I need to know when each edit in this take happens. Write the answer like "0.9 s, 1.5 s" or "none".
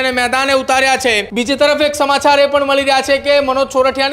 1.3 s